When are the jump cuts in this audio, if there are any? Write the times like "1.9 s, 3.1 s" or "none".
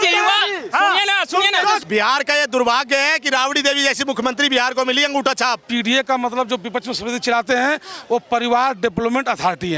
1.8 s, 5.6 s

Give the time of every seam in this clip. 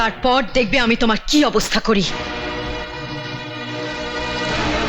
none

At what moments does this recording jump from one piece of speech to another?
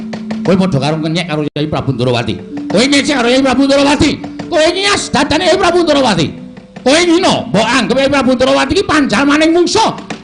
none

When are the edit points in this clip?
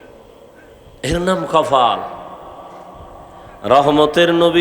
3.5 s

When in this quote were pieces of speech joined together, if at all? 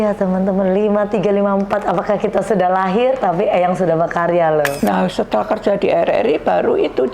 4.7 s

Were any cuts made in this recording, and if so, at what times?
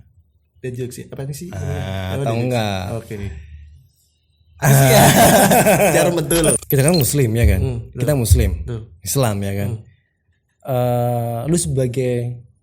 6.6 s

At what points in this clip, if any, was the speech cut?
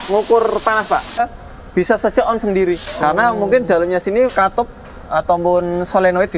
1.2 s, 2.9 s, 4.3 s

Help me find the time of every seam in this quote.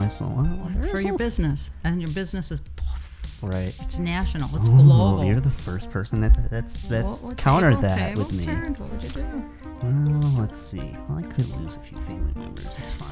9.6 s

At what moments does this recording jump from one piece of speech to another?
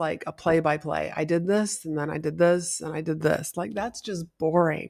none

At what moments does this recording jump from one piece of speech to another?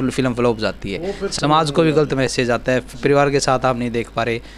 1.2 s

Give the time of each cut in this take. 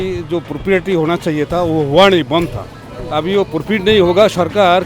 2.9 s

